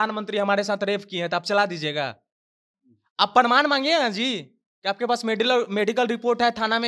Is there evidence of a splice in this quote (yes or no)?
no